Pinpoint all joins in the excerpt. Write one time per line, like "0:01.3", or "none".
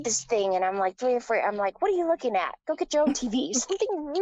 none